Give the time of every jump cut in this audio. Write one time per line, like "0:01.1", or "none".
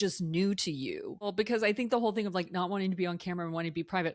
0:01.3